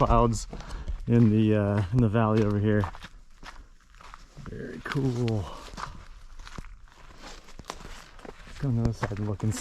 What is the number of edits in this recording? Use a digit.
0